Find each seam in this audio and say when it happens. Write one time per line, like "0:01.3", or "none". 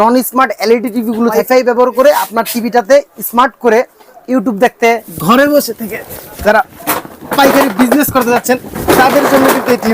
0:01.4
0:05.1